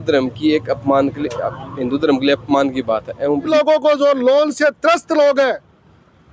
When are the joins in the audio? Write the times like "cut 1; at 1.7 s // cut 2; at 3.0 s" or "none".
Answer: cut 1; at 3.5 s